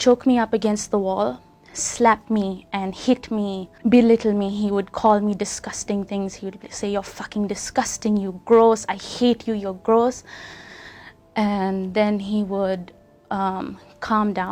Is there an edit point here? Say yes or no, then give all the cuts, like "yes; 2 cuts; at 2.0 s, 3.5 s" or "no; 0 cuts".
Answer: no; 0 cuts